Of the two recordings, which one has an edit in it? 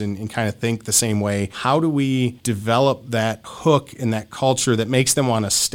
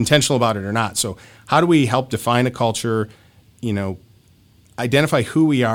first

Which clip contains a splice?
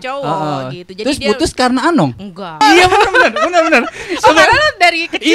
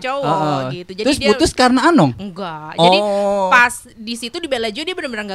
first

